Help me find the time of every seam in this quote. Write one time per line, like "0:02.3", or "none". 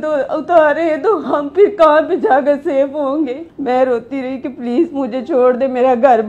0:03.5